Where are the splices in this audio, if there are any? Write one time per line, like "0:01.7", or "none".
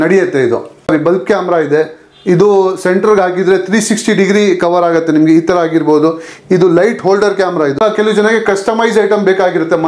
0:00.9
0:07.8